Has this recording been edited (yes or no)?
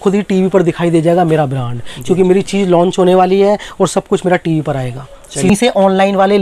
yes